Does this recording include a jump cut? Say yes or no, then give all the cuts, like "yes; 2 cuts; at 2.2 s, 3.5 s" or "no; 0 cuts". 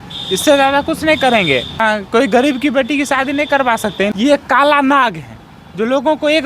yes; 2 cuts; at 1.8 s, 3.9 s